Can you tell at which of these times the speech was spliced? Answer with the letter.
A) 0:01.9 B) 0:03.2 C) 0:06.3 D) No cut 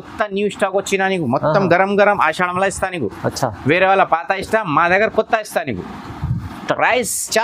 D